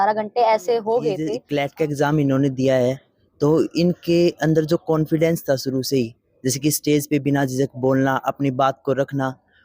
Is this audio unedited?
no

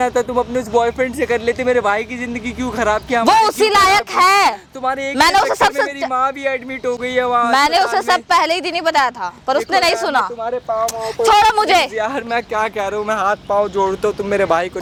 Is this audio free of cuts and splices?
yes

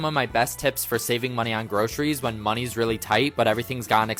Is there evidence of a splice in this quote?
no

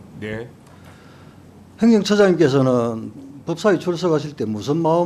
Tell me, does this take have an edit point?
no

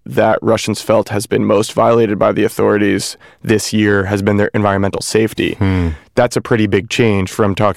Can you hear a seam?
no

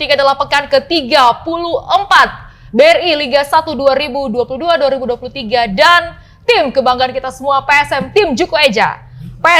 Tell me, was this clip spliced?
no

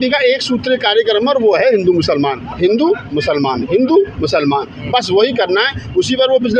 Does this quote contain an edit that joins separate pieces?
yes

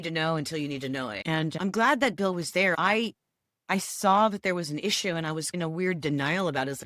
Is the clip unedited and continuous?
no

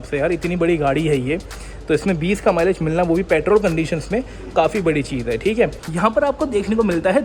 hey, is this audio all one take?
no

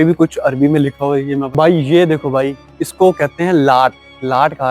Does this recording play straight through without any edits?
no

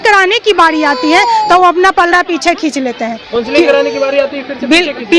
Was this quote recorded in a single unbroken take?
yes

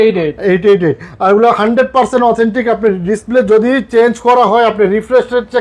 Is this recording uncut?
yes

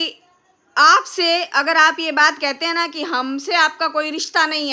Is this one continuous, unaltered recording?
yes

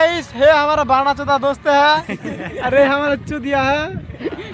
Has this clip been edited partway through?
no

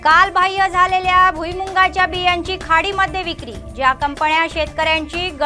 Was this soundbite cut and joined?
no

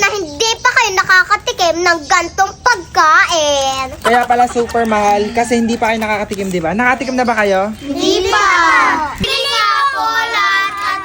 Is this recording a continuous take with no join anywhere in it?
no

